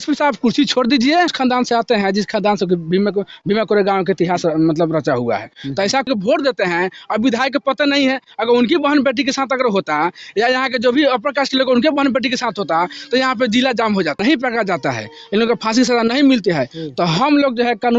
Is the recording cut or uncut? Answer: cut